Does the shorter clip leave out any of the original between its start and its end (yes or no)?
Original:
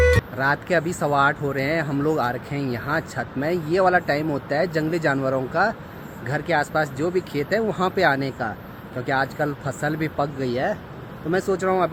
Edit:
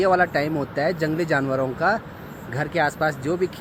no